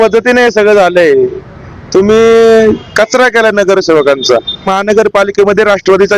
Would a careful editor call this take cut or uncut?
cut